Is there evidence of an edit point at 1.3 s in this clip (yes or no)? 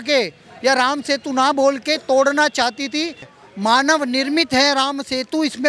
no